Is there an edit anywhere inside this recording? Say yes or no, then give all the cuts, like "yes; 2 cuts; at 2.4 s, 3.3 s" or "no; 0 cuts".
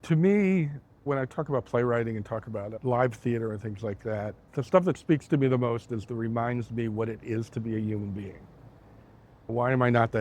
yes; 4 cuts; at 1.0 s, 2.7 s, 4.4 s, 9.5 s